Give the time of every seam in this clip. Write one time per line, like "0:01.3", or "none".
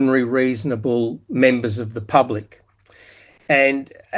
none